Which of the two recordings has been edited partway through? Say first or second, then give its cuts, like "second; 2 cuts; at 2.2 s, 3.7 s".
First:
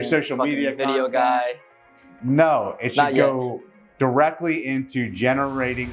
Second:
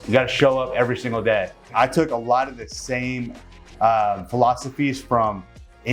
second; 1 cut; at 1.6 s